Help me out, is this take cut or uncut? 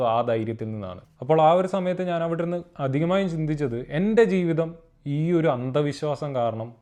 uncut